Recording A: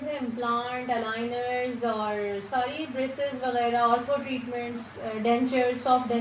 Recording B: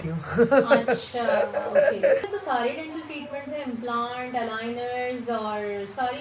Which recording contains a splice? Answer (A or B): B